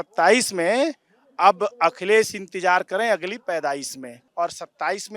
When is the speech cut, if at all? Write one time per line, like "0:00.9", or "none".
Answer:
0:04.2